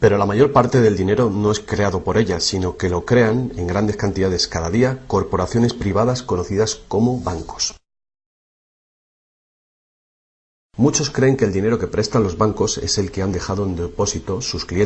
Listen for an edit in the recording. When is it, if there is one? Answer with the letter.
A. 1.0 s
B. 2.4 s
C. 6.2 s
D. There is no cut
B